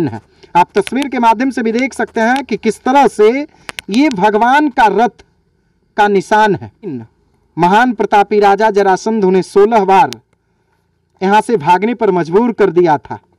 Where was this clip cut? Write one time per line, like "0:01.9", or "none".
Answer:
0:07.0